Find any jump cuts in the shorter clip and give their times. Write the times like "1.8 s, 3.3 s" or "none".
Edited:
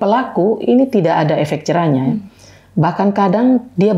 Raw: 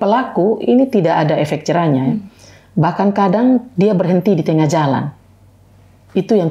none